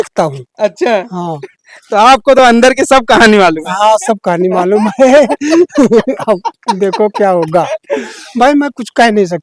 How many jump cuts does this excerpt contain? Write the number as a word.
zero